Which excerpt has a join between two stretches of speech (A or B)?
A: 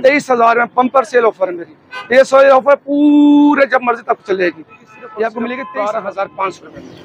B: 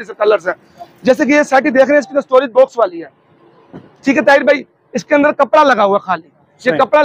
A